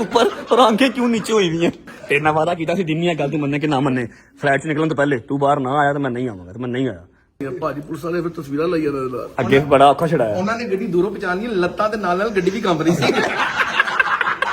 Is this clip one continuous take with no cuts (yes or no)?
no